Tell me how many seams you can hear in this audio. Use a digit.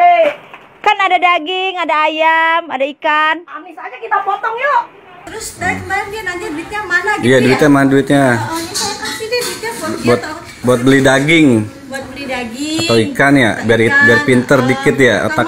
1